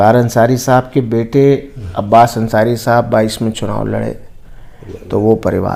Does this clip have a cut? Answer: no; 0 cuts

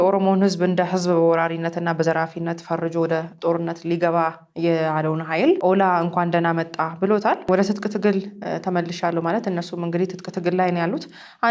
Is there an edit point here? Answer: no; 0 cuts

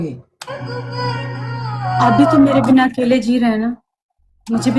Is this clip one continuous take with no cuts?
yes; 0 cuts

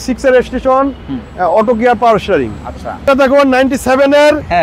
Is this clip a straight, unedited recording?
no; 1 cut; at 3.1 s

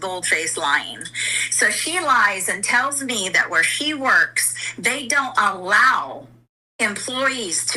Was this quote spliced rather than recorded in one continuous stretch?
no; 0 cuts

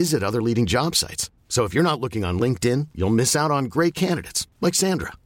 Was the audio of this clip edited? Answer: no; 0 cuts

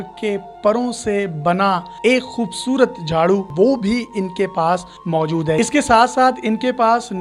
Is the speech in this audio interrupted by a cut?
yes; 2 cuts; at 3.5 s, 5.6 s

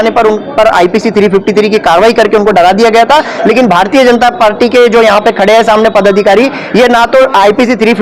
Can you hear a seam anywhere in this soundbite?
no; 0 cuts

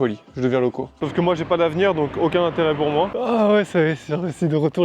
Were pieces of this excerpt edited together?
yes; 2 cuts; at 1.0 s, 3.1 s

